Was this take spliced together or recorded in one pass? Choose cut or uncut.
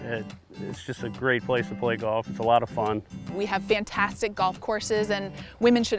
cut